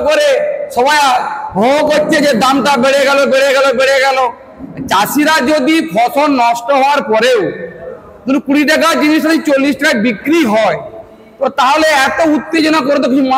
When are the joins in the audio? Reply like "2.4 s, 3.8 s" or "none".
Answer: none